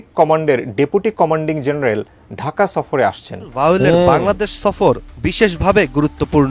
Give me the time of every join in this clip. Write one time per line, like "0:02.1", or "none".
0:03.5

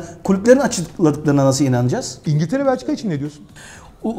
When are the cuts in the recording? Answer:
0:02.2

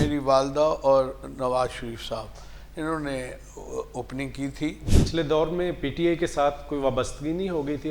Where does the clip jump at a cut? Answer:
0:04.8

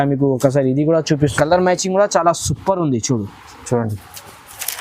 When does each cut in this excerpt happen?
0:01.2

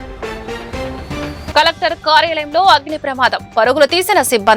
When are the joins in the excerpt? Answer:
0:01.5

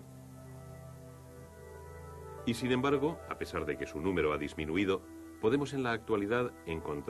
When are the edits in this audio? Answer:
none

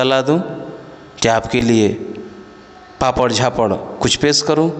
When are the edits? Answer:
none

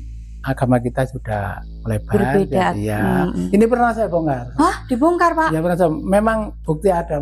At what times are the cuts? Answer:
0:03.4
0:04.4

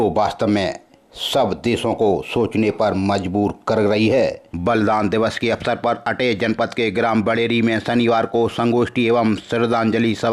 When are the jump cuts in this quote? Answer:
0:04.5

